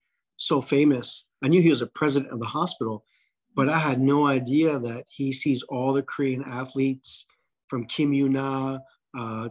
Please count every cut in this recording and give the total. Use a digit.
1